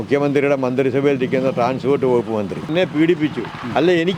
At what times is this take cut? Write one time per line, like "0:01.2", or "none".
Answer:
0:02.7